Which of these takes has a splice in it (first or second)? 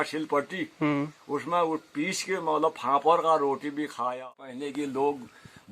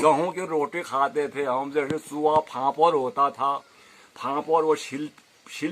first